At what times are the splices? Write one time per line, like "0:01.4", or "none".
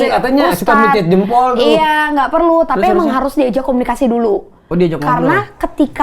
none